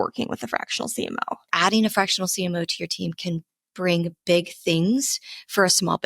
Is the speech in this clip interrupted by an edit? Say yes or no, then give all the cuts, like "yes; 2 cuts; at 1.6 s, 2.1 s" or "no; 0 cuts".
yes; 1 cut; at 1.5 s